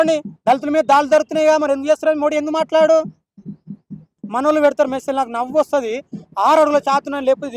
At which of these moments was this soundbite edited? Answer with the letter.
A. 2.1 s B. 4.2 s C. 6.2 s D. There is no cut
B